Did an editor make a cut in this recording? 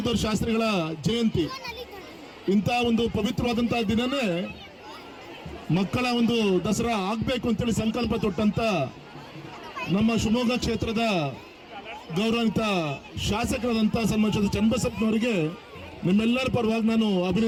no; 0 cuts

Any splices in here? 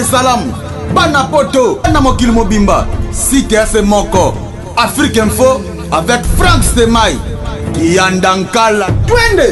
no; 0 cuts

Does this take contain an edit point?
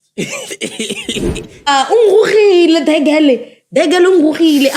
yes; 1 cut; at 1.7 s

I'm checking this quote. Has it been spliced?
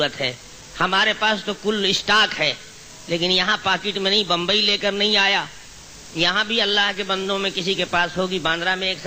no; 0 cuts

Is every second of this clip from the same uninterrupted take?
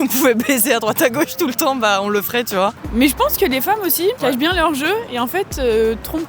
no; 2 cuts; at 2.8 s, 4.2 s

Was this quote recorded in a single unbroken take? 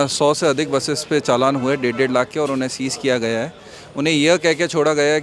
yes; 0 cuts

